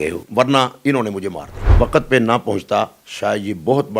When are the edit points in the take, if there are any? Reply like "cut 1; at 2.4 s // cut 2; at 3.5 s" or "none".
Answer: cut 1; at 1.6 s